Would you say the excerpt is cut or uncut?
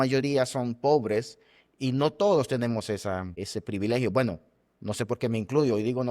cut